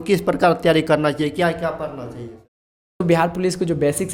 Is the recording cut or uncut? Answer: cut